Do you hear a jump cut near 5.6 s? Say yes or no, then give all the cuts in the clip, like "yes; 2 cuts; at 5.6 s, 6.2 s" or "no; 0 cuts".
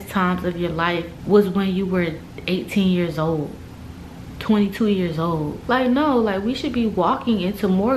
yes; 2 cuts; at 1.1 s, 5.6 s